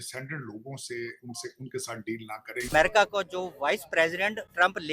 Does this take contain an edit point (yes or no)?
yes